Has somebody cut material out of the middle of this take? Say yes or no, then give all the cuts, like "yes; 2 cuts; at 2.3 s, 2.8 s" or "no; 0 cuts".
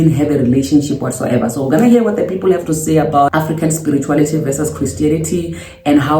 yes; 1 cut; at 3.3 s